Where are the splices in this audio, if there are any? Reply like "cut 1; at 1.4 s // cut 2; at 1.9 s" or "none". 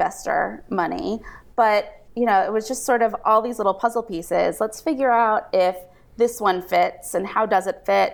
cut 1; at 2.0 s